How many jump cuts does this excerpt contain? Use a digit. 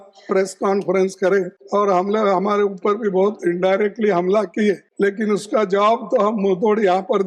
2